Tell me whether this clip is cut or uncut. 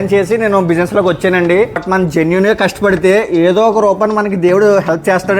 cut